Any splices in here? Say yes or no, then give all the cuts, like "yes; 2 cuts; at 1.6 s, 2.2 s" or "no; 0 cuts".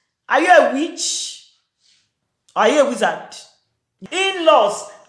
yes; 1 cut; at 4.0 s